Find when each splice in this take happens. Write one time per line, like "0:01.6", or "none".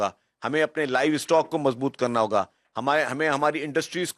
none

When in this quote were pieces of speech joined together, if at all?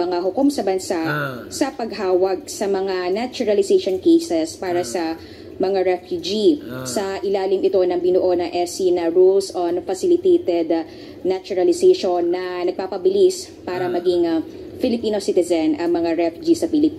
0:16.0

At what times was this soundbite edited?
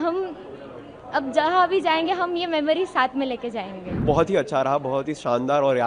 0:04.0

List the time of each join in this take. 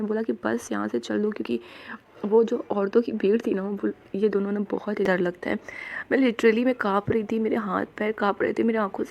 0:05.0

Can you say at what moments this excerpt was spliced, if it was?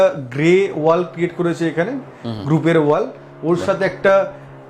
none

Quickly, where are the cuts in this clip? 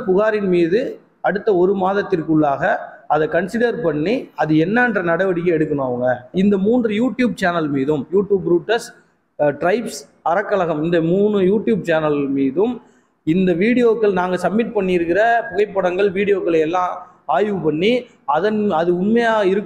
0:06.3

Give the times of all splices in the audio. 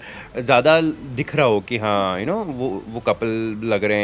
none

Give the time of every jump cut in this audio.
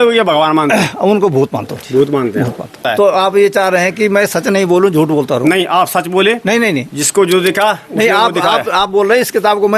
0:02.8

